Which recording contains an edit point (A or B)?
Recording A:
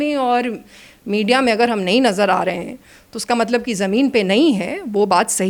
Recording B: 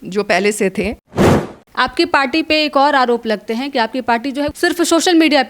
B